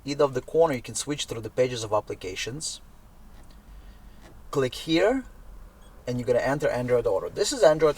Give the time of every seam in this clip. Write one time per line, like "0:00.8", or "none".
0:04.4